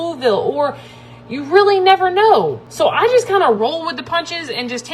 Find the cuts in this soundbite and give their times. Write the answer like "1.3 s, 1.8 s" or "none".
2.6 s